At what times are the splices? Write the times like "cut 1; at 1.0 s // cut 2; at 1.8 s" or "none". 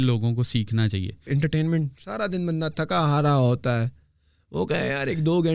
cut 1; at 1.2 s